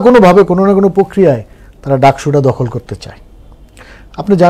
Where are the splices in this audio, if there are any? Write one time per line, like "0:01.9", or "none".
none